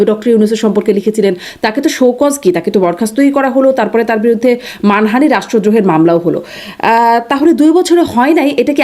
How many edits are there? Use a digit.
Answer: 0